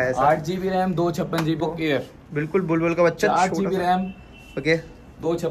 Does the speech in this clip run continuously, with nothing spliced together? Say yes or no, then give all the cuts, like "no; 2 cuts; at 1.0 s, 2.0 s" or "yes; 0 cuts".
no; 1 cut; at 1.6 s